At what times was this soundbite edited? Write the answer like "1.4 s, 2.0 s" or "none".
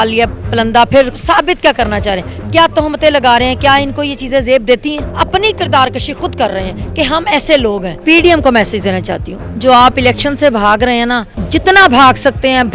1.2 s, 5.0 s, 7.9 s, 11.3 s